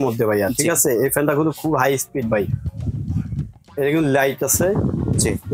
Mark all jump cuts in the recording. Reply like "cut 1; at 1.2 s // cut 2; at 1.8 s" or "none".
none